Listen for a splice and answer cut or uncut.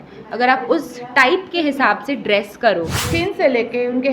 cut